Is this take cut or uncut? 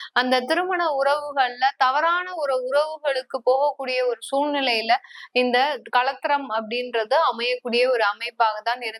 uncut